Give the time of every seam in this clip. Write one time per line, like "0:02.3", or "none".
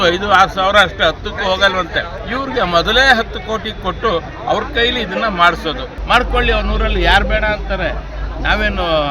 0:02.2
0:06.0